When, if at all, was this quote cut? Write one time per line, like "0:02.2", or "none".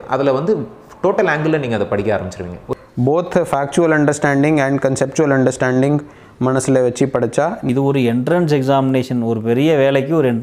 0:02.8
0:07.7